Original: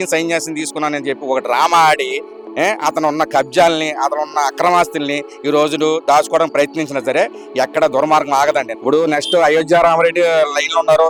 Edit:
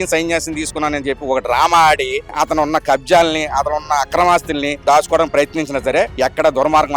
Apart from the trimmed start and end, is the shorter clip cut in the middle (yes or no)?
yes